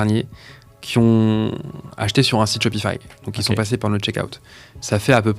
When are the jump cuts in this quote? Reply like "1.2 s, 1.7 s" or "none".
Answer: none